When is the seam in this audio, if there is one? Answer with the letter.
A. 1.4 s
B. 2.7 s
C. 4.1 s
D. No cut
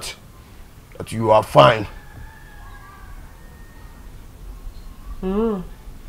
D